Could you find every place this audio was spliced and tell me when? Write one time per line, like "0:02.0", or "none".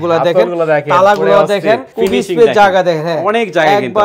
0:01.9

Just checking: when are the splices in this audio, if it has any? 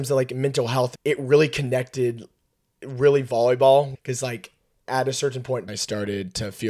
0:00.9
0:03.9
0:05.7

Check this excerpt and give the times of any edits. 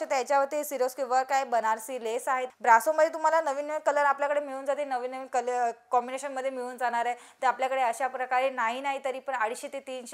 0:02.5

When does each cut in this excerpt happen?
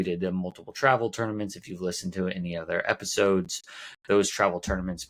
none

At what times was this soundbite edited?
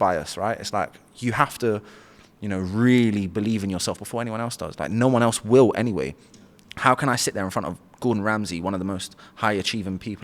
none

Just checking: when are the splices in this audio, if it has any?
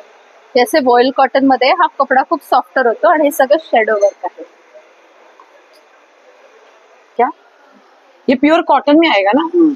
0:07.1

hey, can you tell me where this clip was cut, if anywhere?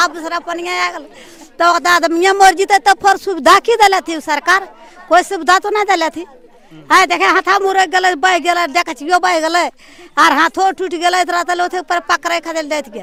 none

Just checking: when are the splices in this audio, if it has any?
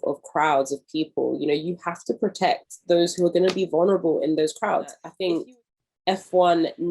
0:05.0

